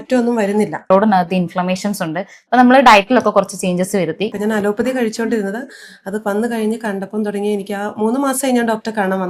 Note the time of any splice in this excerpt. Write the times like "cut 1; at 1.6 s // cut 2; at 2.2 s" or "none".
cut 1; at 0.9 s // cut 2; at 4.3 s